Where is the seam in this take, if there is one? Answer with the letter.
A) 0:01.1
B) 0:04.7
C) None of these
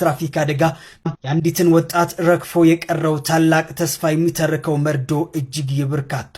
A